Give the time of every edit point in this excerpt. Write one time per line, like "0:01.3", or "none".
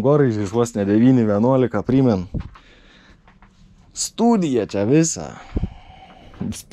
none